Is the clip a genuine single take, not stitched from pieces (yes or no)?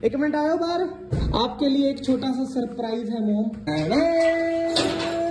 no